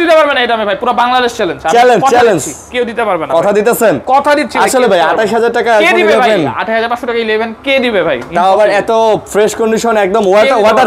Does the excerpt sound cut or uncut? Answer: uncut